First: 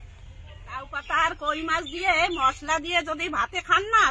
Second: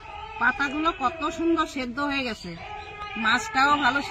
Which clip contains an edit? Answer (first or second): first